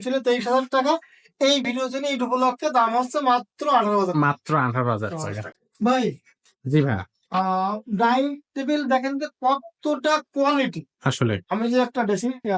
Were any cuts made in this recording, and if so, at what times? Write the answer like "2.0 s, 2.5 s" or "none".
5.6 s